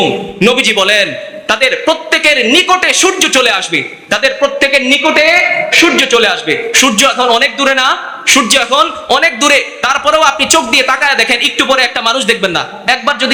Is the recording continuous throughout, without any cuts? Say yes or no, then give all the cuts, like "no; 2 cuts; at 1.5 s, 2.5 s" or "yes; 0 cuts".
yes; 0 cuts